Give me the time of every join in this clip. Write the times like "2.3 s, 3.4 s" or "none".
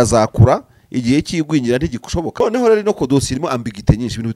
2.4 s